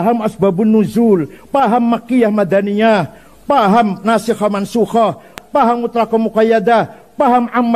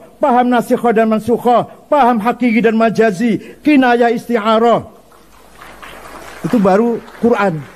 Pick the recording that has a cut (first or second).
first